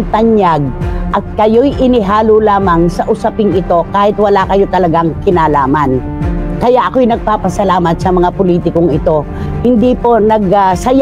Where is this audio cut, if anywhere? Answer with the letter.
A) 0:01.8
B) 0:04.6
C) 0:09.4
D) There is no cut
C